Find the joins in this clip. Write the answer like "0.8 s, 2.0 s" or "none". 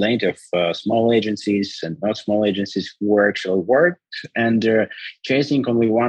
none